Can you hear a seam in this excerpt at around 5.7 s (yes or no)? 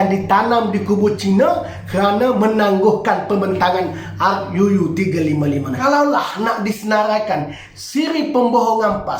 yes